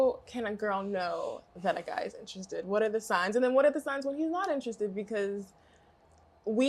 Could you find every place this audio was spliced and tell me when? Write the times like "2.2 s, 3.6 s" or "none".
none